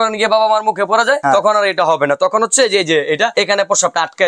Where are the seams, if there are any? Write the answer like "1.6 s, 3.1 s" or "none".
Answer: 1.2 s, 3.3 s